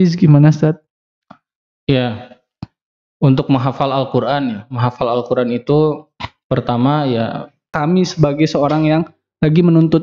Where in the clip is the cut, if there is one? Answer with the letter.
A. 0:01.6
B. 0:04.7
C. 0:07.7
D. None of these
C